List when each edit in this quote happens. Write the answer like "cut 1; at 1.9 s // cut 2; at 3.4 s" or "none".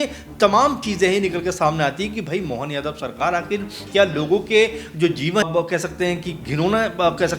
cut 1; at 5.4 s